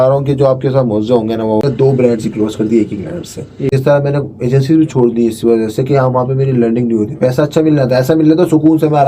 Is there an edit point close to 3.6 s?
yes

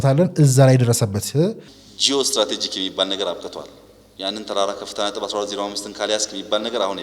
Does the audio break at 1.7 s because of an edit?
yes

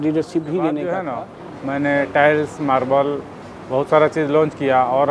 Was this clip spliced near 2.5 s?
no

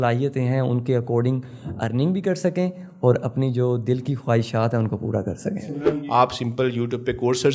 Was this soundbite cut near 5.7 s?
yes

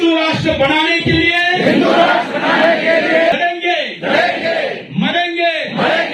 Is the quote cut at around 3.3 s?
yes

